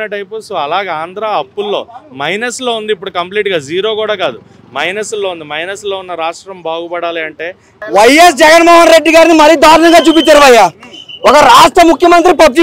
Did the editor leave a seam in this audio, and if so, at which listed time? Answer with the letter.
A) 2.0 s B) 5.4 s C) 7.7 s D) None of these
C